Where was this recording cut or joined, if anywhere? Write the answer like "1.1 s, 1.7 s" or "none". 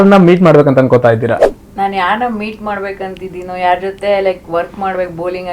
1.6 s